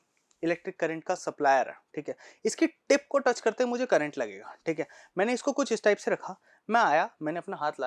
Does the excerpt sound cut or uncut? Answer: uncut